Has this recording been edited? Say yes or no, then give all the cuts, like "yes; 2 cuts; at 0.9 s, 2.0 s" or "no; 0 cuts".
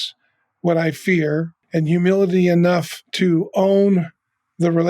yes; 2 cuts; at 1.6 s, 3.0 s